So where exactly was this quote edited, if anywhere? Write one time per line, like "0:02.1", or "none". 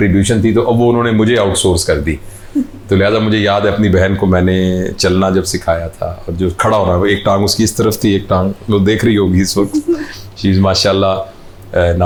none